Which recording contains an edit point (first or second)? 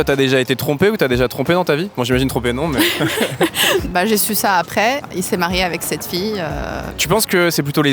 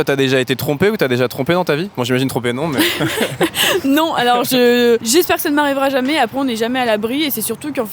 first